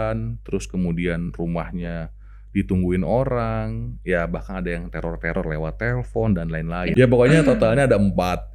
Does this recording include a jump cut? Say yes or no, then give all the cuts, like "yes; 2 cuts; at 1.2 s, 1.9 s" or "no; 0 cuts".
yes; 1 cut; at 6.7 s